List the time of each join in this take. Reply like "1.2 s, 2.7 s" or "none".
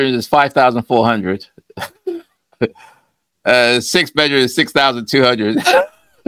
none